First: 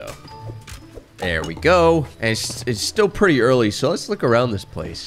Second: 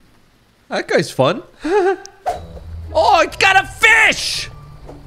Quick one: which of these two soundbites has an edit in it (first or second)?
second